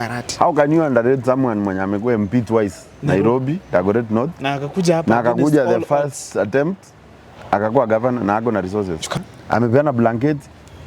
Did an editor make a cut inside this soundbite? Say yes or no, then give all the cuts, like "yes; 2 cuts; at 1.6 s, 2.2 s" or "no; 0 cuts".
yes; 1 cut; at 9.0 s